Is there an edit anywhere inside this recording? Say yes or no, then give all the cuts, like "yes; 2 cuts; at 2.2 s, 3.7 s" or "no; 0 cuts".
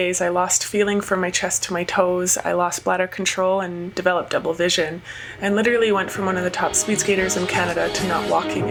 no; 0 cuts